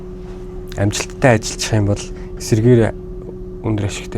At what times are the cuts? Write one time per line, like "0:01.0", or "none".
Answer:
none